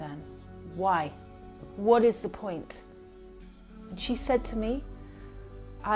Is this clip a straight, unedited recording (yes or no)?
yes